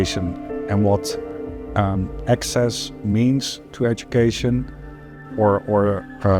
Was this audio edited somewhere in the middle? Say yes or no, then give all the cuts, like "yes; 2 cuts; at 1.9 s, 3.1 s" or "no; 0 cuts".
no; 0 cuts